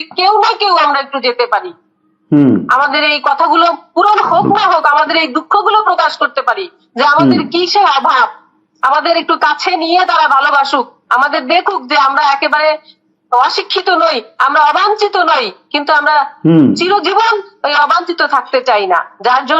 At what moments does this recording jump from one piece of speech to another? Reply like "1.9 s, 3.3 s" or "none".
none